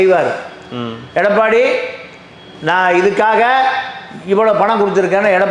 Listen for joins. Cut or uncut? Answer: uncut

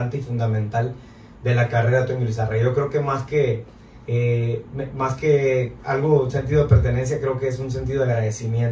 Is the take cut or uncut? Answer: uncut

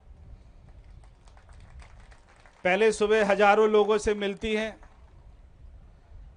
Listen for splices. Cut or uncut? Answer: uncut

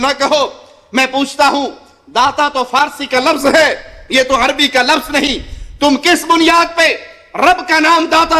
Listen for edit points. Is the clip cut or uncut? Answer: uncut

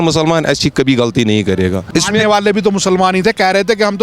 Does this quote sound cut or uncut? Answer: cut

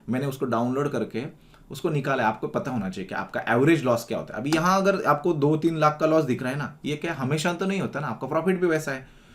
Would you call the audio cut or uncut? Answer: uncut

